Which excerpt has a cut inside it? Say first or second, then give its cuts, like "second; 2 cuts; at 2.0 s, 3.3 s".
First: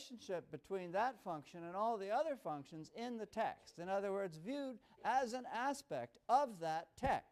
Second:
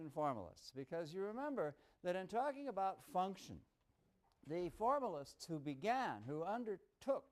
second; 1 cut; at 6.2 s